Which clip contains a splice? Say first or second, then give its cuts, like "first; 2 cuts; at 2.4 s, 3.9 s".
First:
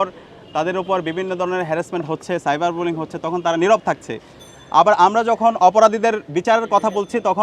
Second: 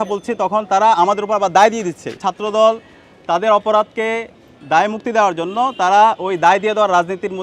second; 1 cut; at 2.2 s